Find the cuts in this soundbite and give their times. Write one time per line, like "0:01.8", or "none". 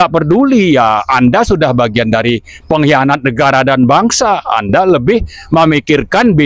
none